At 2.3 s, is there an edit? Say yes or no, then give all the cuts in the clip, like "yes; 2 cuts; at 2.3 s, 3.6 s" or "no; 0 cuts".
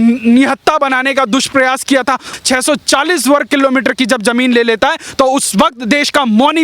yes; 1 cut; at 2.3 s